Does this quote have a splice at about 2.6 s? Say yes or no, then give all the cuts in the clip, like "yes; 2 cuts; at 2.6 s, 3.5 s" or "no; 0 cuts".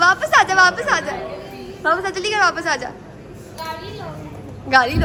no; 0 cuts